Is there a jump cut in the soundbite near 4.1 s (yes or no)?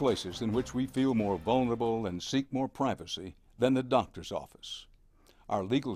yes